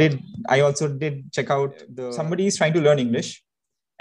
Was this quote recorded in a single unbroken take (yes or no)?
no